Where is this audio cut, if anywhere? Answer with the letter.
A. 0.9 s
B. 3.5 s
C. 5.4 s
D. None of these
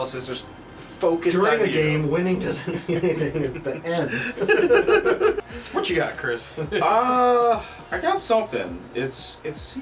C